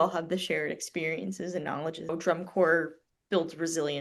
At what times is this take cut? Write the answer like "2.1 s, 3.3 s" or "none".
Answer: 2.1 s